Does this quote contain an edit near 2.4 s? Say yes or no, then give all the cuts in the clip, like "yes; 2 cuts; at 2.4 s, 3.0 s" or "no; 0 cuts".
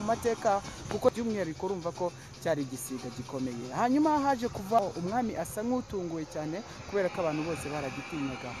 no; 2 cuts; at 1.1 s, 4.8 s